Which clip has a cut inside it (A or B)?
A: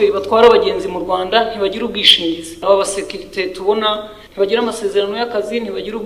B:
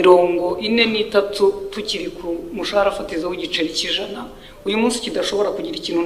A